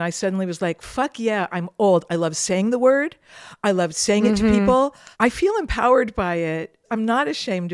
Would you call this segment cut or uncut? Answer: cut